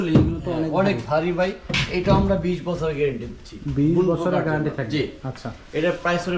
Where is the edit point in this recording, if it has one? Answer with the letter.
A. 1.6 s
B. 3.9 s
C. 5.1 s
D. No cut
D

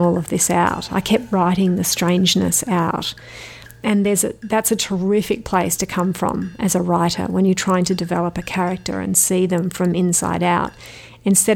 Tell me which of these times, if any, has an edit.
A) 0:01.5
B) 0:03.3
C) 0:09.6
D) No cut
D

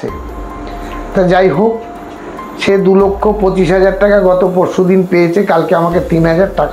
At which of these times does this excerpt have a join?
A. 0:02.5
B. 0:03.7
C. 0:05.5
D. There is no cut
D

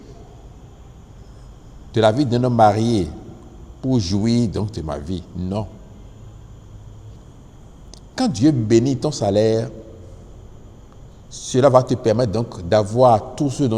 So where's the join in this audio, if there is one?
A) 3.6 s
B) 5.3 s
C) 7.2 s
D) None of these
C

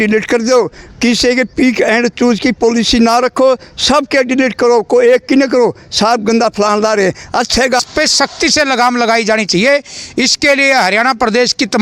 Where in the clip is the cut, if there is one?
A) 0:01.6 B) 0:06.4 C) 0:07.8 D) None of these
C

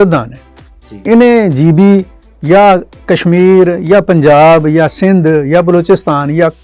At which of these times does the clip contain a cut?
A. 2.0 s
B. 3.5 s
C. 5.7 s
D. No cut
D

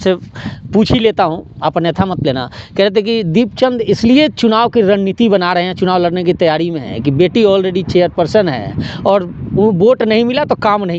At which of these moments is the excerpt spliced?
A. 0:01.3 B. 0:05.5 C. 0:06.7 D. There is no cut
D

